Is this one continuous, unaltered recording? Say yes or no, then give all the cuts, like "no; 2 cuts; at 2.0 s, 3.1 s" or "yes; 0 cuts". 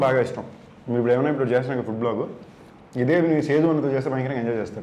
yes; 0 cuts